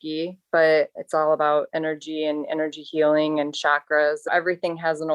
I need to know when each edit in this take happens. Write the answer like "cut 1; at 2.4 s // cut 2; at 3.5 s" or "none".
cut 1; at 1.0 s // cut 2; at 4.3 s